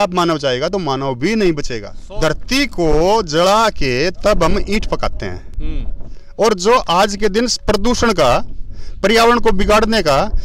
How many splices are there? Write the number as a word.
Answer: one